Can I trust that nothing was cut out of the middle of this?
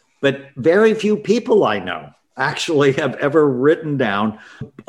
yes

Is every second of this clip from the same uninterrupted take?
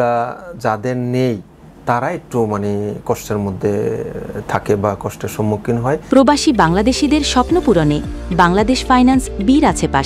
no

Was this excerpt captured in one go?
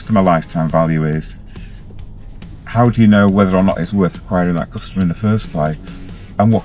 yes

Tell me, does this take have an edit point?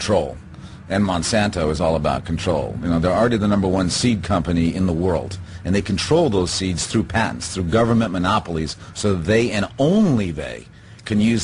no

